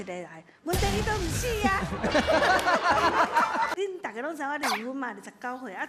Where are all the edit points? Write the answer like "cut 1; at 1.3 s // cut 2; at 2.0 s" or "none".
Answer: cut 1; at 3.7 s

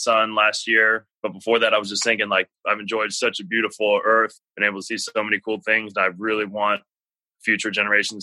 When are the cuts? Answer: cut 1; at 1.1 s // cut 2; at 2.5 s // cut 3; at 4.3 s

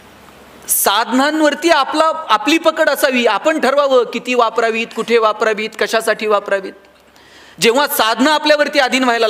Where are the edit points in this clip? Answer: none

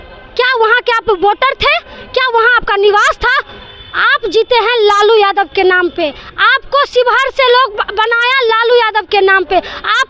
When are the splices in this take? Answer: none

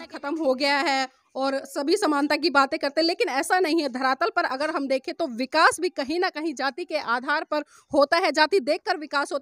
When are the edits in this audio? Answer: none

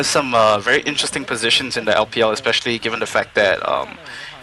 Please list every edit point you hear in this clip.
none

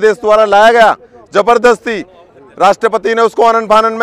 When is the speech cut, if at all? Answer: none

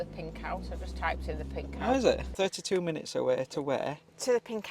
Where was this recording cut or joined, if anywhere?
cut 1; at 2.3 s

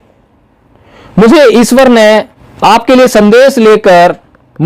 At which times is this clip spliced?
cut 1; at 2.4 s

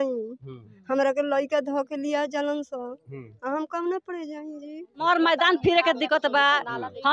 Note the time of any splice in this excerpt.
cut 1; at 5.0 s

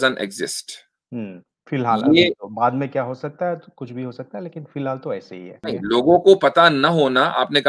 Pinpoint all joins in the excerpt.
cut 1; at 5.6 s

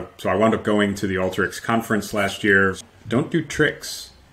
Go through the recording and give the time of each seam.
cut 1; at 2.9 s

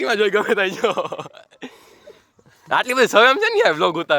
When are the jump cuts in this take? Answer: none

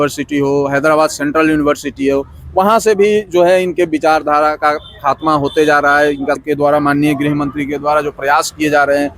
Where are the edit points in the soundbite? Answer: cut 1; at 6.4 s

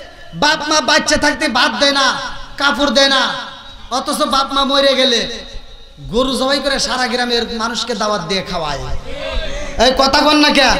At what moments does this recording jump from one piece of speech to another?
none

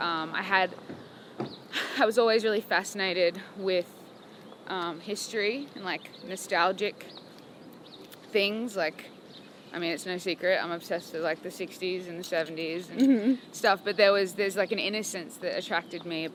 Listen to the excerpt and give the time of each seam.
none

